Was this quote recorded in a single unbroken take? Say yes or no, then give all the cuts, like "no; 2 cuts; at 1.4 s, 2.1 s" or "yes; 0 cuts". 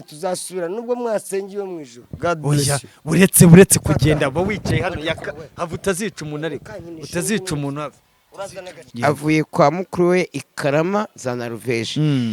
no; 1 cut; at 8.8 s